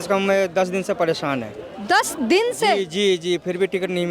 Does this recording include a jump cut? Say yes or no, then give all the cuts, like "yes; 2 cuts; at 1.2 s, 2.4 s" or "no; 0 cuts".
no; 0 cuts